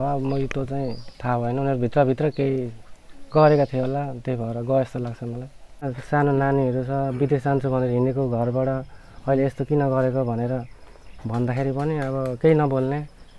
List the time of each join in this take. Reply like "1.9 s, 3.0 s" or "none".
5.9 s